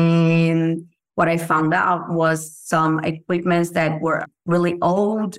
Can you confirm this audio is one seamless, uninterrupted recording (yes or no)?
no